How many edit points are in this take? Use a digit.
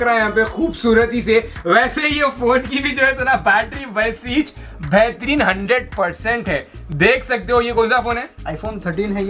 0